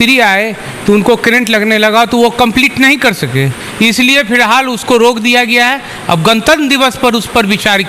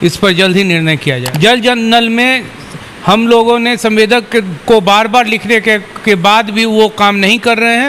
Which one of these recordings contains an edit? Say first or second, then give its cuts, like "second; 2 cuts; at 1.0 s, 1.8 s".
second; 1 cut; at 1.2 s